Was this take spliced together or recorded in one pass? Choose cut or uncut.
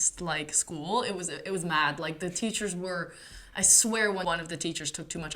cut